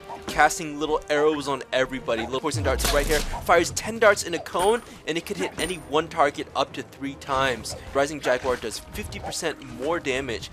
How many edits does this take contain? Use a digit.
2